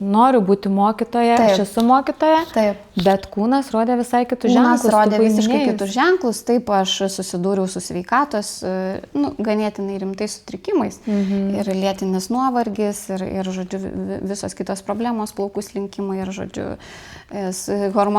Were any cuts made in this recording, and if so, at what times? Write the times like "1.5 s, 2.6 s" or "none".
none